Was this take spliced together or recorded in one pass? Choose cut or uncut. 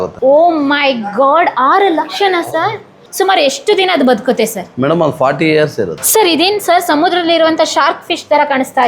cut